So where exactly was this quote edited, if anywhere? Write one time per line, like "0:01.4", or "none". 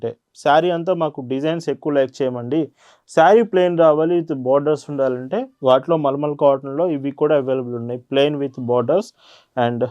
none